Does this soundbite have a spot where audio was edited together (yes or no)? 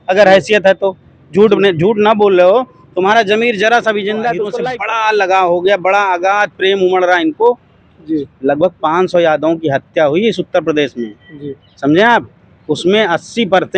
yes